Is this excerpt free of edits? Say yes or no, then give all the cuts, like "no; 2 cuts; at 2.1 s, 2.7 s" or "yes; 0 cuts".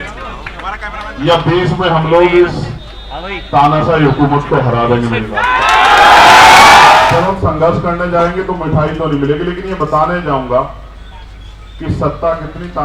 no; 1 cut; at 7.1 s